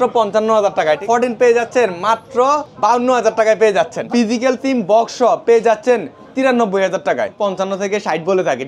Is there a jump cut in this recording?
yes; 4 cuts; at 1.0 s, 2.7 s, 4.0 s, 7.3 s

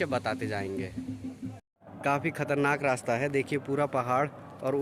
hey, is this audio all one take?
no; 1 cut; at 1.9 s

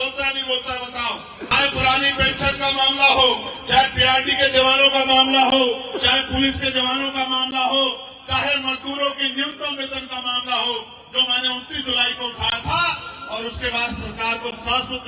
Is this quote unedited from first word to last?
no; 1 cut; at 1.5 s

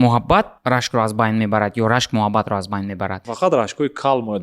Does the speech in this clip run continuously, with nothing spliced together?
no; 1 cut; at 3.3 s

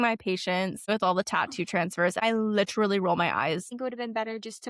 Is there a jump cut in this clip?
yes; 3 cuts; at 0.9 s, 2.2 s, 3.7 s

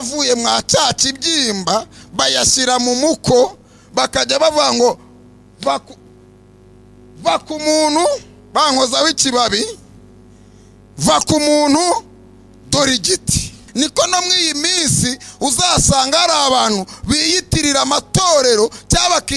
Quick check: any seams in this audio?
yes; 1 cut; at 13.6 s

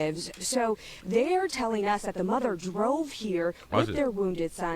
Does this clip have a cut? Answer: yes; 1 cut; at 2.3 s

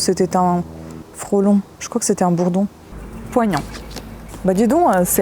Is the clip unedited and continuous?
no; 1 cut; at 2.9 s

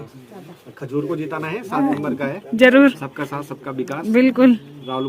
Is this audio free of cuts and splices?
yes; 0 cuts

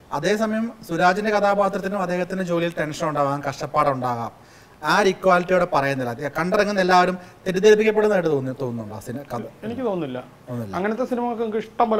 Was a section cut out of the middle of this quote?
no; 0 cuts

